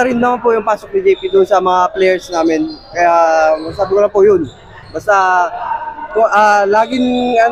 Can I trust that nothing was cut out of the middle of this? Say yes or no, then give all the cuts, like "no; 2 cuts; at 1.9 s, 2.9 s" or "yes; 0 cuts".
yes; 0 cuts